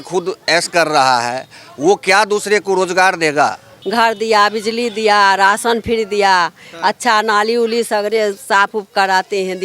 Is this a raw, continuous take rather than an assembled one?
no; 1 cut; at 3.7 s

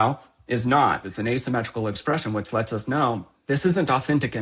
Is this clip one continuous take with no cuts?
no; 2 cuts; at 1.1 s, 3.3 s

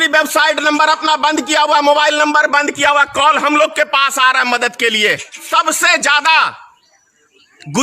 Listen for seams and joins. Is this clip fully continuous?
no; 1 cut; at 5.4 s

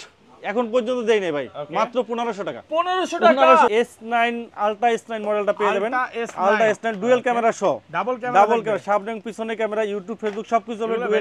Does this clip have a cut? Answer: yes; 1 cut; at 3.7 s

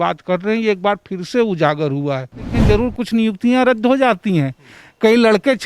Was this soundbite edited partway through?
yes; 1 cut; at 2.5 s

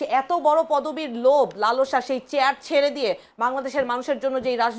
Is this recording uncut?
yes; 0 cuts

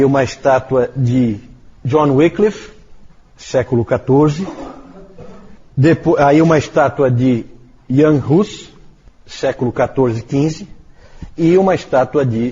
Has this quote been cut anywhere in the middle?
yes; 1 cut; at 11.4 s

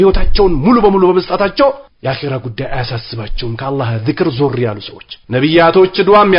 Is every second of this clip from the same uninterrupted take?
yes; 0 cuts

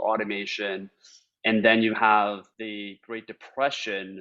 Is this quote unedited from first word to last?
no; 1 cut; at 2.5 s

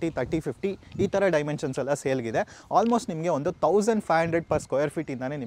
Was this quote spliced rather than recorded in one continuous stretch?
no; 0 cuts

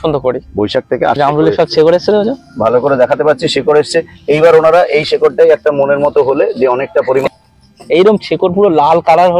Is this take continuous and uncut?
no; 2 cuts; at 1.2 s, 7.3 s

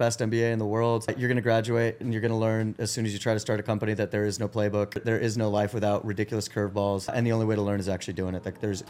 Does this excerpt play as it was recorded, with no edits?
no; 3 cuts; at 1.2 s, 5.0 s, 7.1 s

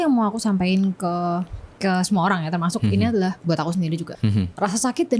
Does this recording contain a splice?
no; 0 cuts

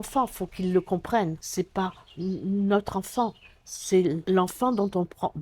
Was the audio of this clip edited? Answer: yes; 2 cuts; at 1.4 s, 4.2 s

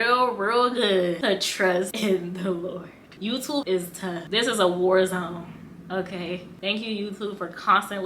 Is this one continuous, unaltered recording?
no; 1 cut; at 1.9 s

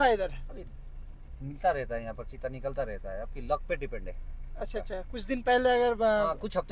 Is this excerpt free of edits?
yes; 0 cuts

